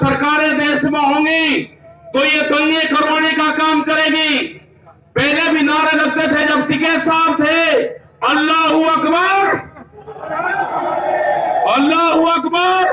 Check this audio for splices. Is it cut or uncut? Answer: uncut